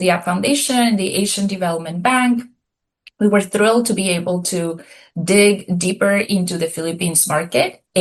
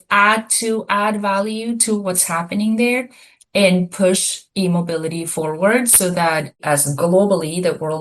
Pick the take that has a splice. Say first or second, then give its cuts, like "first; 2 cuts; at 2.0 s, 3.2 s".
second; 1 cut; at 6.5 s